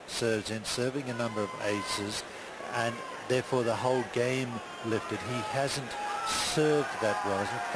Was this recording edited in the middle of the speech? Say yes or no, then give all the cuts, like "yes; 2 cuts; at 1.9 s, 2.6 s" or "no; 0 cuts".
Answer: yes; 1 cut; at 5.3 s